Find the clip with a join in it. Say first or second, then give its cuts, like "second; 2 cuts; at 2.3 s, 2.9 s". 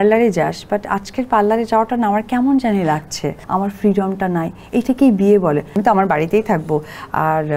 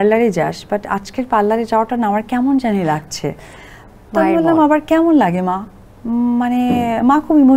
first; 2 cuts; at 3.4 s, 5.8 s